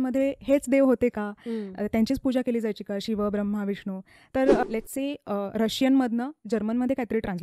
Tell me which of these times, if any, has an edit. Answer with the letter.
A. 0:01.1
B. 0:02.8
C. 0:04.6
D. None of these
C